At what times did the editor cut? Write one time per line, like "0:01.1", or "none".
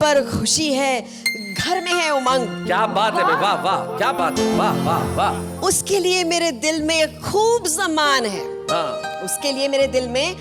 none